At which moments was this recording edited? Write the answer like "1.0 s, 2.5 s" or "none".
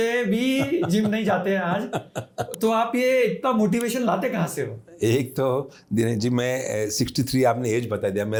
none